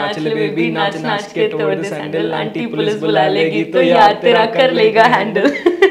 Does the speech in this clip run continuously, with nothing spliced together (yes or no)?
yes